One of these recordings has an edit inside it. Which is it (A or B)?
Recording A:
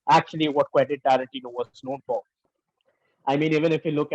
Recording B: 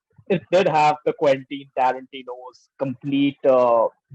A